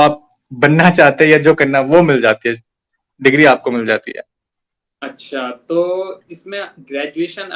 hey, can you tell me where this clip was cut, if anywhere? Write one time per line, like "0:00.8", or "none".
none